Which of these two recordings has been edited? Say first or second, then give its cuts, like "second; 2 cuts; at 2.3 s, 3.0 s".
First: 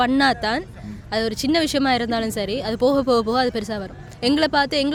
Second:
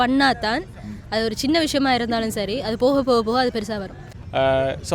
second; 1 cut; at 4.0 s